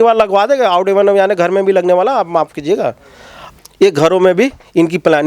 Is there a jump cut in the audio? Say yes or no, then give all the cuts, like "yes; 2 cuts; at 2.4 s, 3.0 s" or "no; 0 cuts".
yes; 1 cut; at 3.4 s